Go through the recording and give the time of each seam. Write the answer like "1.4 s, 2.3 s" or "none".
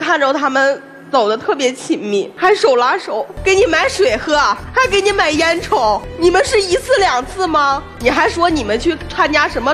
2.3 s, 3.3 s, 4.6 s, 6.1 s, 7.9 s